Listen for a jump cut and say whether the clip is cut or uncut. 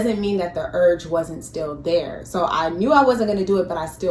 cut